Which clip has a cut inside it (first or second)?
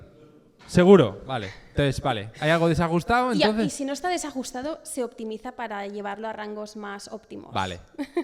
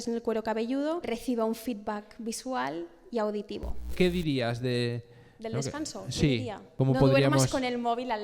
second